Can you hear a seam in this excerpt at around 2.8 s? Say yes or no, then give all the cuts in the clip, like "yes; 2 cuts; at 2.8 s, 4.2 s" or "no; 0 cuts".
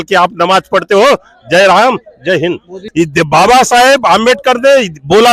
yes; 1 cut; at 2.8 s